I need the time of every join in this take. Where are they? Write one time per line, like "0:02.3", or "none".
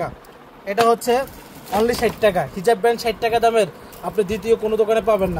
none